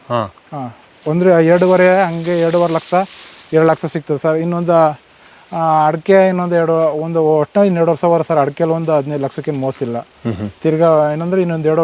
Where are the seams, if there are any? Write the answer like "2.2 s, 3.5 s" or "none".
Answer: none